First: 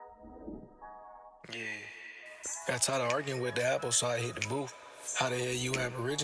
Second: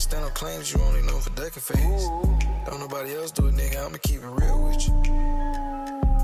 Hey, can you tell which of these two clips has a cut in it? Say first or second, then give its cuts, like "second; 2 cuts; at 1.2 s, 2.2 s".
first; 1 cut; at 1.4 s